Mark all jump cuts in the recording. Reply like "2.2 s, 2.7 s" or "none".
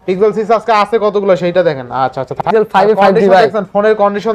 2.4 s